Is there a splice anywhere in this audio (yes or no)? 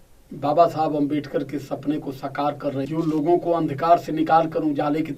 yes